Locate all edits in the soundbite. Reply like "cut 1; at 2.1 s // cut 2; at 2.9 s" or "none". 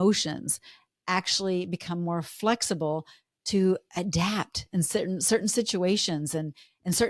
none